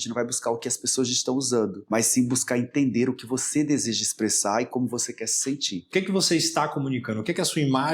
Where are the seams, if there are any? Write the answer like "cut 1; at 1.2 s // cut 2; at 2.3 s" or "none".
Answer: cut 1; at 1.8 s // cut 2; at 5.8 s